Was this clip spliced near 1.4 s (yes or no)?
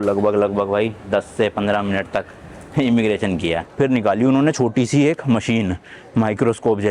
no